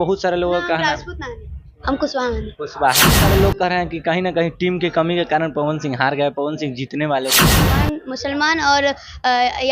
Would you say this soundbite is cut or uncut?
cut